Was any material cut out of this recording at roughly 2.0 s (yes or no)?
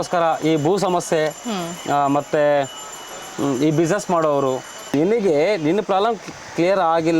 no